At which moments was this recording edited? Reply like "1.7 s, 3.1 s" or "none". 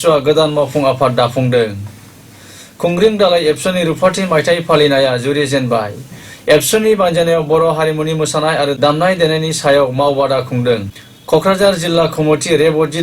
none